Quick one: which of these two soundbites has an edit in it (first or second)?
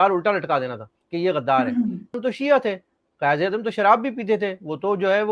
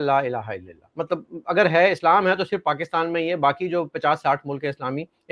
first